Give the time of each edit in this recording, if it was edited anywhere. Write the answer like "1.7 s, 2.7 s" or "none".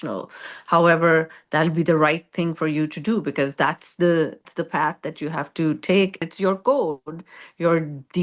4.5 s, 6.2 s